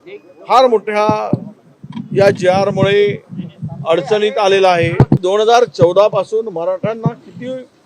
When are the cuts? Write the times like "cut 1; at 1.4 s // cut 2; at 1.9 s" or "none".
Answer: cut 1; at 5.2 s